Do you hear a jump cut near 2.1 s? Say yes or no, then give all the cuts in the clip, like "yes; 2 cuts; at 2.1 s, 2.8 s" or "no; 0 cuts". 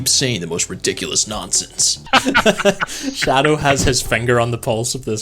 yes; 1 cut; at 2.1 s